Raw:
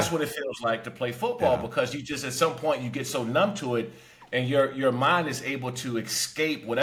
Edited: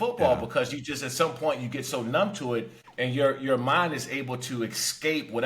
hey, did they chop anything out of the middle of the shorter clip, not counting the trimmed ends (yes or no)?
yes